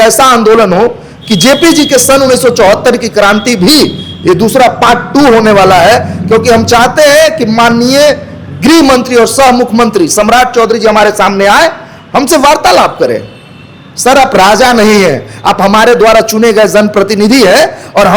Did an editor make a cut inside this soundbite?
no; 0 cuts

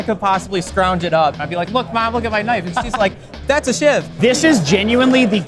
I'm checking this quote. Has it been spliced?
yes; 2 cuts; at 1.4 s, 4.1 s

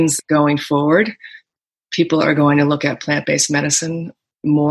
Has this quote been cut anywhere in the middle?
no; 0 cuts

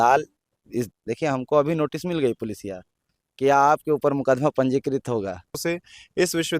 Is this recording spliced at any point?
yes; 2 cuts; at 1.0 s, 5.6 s

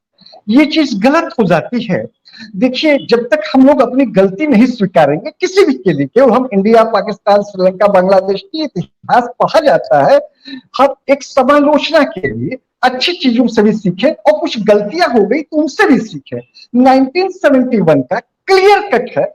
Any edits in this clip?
no; 0 cuts

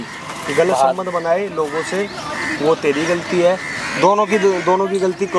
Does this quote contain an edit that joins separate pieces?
no; 0 cuts

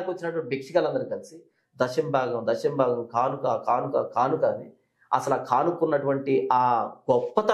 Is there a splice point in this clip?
no; 0 cuts

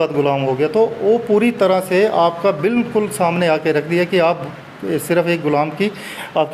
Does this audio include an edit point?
no; 0 cuts

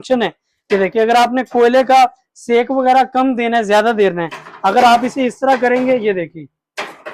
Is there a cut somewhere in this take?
no; 0 cuts

